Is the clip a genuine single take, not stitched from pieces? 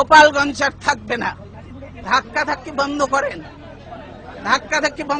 no; 1 cut; at 1.9 s

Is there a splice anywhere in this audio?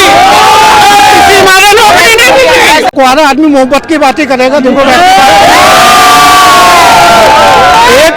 yes; 1 cut; at 2.9 s

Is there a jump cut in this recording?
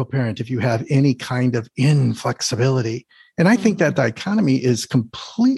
no; 0 cuts

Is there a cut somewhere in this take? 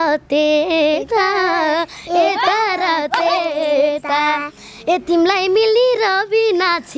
no; 0 cuts

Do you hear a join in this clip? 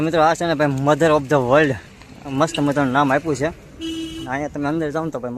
no; 0 cuts

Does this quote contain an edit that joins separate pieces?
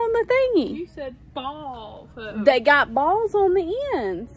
no; 0 cuts

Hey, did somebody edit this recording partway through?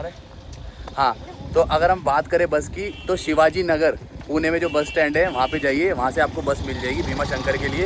no; 0 cuts

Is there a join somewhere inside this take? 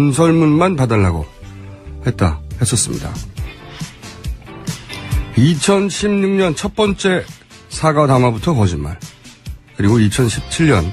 yes; 1 cut; at 9.6 s

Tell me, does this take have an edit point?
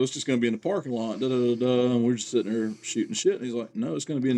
no; 0 cuts

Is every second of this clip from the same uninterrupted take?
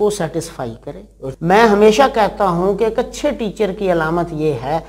no; 1 cut; at 1.2 s

